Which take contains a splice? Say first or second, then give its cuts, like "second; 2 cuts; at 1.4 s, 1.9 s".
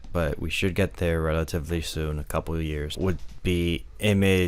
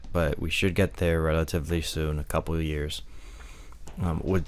first; 1 cut; at 3.0 s